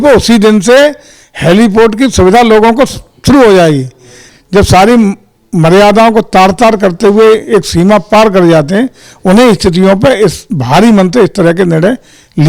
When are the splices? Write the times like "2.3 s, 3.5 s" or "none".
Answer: 4.3 s